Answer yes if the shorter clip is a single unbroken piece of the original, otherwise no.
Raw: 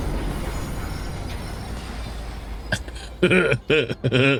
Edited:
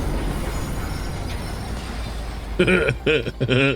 no